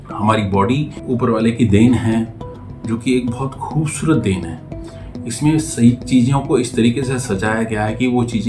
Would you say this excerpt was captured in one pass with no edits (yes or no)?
no